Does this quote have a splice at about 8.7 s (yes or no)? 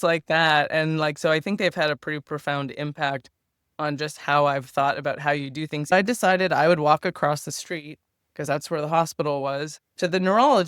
no